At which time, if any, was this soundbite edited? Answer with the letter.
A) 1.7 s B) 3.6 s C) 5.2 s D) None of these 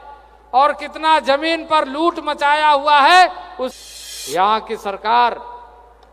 B